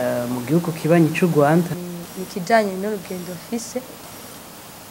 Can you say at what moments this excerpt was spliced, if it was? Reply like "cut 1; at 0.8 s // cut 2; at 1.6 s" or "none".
cut 1; at 1.7 s